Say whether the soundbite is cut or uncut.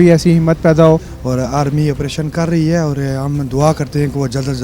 cut